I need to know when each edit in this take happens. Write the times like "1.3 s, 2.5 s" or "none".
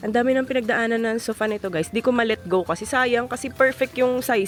none